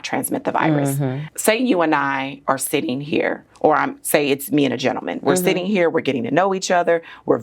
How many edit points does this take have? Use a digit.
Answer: 1